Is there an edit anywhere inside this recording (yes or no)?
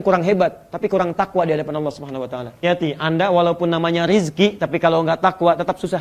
yes